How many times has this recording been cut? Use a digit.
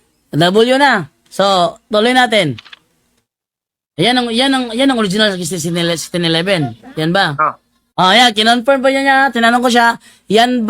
0